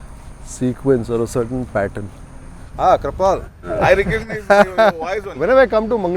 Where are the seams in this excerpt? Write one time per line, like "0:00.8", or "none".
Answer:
0:02.7
0:05.2